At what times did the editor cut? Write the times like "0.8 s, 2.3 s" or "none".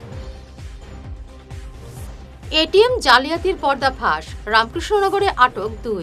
none